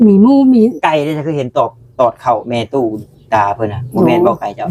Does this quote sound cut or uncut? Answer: uncut